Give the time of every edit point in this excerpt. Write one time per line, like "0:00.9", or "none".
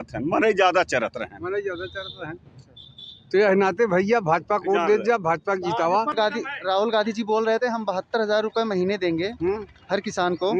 0:06.1